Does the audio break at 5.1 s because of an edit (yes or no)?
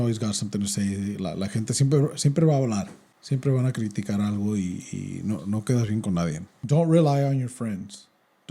no